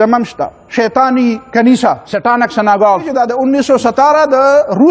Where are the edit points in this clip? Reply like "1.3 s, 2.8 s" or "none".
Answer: 2.1 s, 3.1 s